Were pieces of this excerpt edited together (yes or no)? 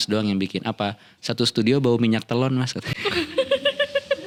no